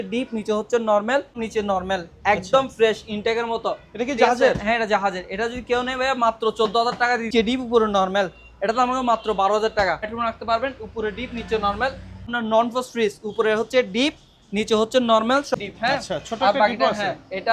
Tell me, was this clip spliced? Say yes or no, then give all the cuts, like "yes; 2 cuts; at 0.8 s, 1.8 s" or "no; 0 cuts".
yes; 5 cuts; at 1.4 s, 7.3 s, 10.1 s, 12.3 s, 15.5 s